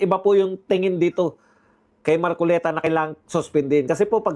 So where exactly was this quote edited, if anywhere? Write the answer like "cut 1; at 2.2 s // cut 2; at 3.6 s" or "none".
none